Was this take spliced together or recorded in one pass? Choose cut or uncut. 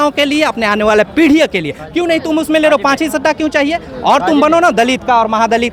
uncut